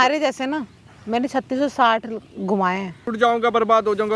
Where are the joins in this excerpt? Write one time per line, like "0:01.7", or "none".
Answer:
0:03.0